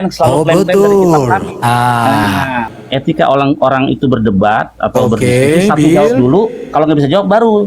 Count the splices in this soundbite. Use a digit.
1